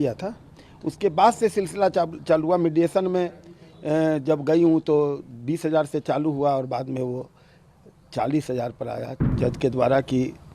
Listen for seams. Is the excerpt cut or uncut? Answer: cut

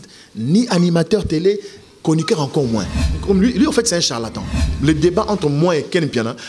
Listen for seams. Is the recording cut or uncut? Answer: cut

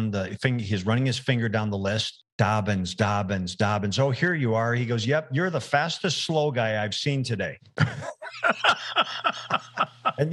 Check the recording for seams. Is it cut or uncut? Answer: cut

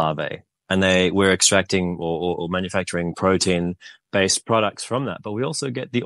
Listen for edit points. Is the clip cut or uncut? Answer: uncut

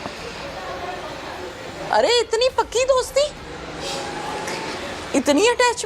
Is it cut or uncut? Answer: uncut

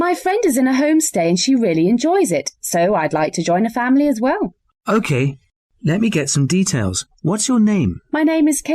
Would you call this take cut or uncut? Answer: cut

